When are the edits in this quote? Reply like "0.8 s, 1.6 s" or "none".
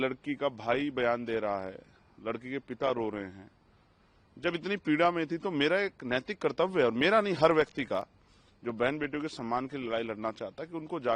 none